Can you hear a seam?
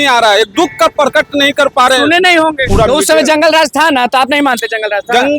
yes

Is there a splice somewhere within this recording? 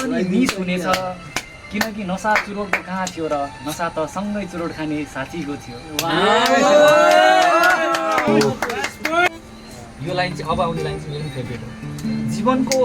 yes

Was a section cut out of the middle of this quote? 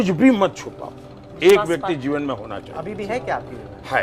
no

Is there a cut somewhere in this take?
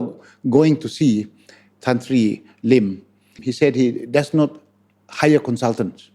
yes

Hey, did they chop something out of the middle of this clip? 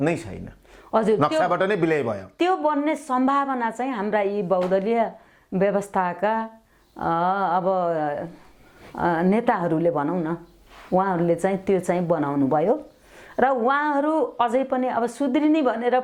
no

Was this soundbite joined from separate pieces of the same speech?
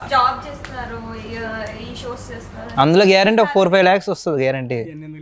no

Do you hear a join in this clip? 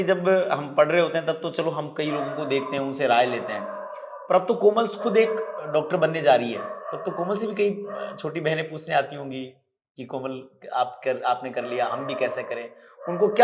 no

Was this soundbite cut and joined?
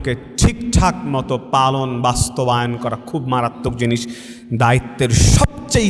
no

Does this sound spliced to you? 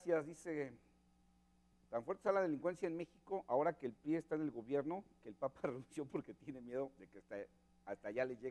yes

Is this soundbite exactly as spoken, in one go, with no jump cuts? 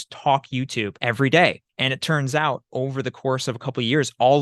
no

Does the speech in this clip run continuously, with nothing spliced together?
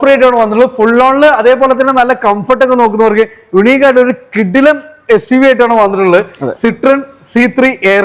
yes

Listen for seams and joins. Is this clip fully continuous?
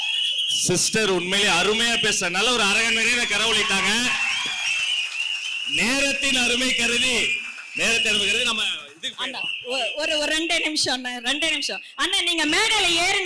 yes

